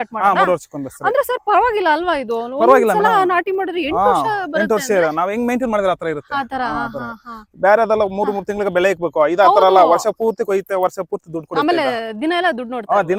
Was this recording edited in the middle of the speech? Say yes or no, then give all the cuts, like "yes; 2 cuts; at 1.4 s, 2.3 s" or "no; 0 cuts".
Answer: no; 0 cuts